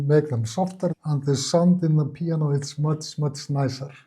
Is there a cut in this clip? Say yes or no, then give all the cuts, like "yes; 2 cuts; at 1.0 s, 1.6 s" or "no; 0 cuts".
yes; 1 cut; at 0.9 s